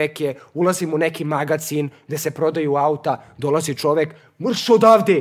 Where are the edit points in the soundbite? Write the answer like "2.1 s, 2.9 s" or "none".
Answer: none

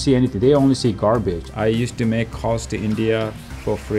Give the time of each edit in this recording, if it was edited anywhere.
1.4 s

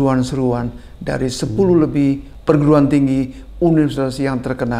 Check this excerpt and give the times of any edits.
2.3 s

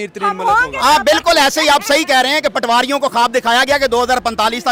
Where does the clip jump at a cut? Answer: none

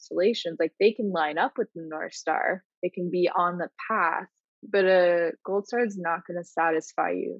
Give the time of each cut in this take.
none

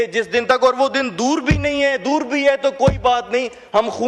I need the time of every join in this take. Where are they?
none

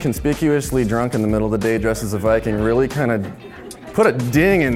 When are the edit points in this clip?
none

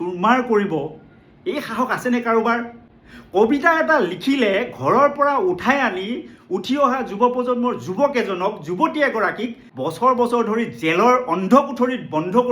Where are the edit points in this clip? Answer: 9.6 s

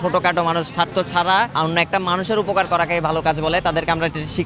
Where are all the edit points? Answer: 1.5 s

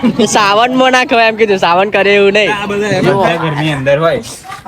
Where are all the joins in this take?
3.0 s

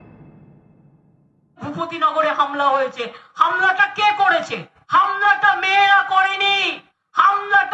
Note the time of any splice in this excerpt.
1.5 s

